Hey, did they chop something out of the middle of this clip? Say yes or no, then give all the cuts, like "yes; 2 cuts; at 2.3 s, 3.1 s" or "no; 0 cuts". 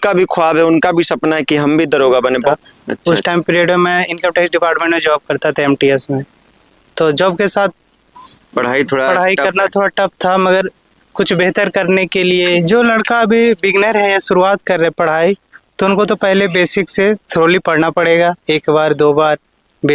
yes; 2 cuts; at 2.5 s, 12.6 s